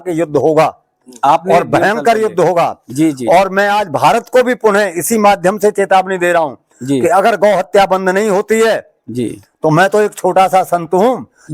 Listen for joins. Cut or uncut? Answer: uncut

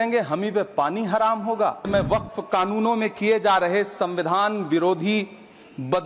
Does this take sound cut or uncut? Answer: cut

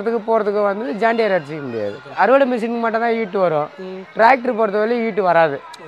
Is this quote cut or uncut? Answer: cut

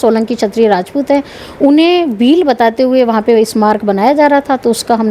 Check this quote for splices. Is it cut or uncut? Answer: uncut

